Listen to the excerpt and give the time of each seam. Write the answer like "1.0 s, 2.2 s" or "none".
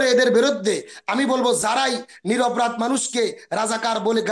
none